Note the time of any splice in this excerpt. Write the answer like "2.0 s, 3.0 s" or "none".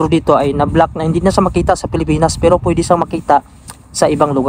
none